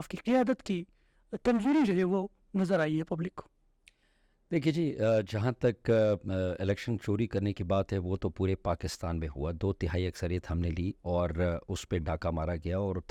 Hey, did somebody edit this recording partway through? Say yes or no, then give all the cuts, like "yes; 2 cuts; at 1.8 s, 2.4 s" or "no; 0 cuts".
no; 0 cuts